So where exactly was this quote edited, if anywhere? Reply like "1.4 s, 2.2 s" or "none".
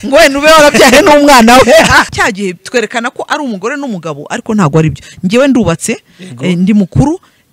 2.1 s